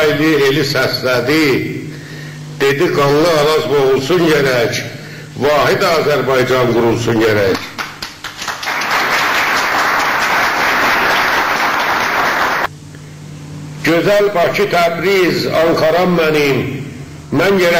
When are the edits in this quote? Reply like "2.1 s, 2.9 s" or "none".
12.4 s